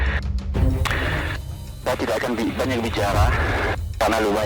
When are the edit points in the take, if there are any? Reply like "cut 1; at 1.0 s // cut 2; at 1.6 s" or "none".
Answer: none